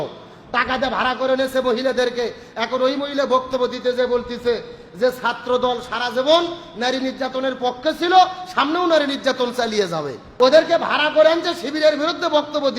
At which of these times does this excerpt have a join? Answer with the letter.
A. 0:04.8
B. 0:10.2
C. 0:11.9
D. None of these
B